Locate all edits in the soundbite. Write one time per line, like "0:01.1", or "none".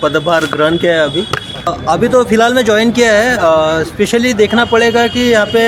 0:01.8